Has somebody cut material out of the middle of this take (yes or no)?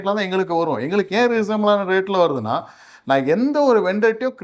no